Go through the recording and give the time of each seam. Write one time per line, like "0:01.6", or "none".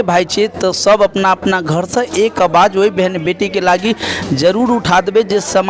none